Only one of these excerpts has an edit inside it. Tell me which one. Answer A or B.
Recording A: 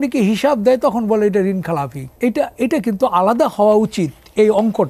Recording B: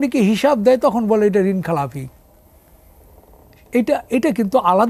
A